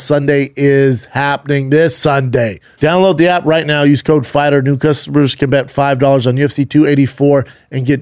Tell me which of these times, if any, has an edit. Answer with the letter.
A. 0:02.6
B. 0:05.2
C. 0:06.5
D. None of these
A